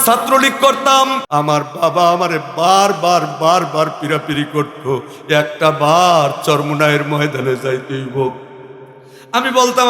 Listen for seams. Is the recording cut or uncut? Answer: cut